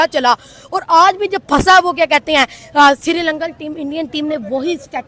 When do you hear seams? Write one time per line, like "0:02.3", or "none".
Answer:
none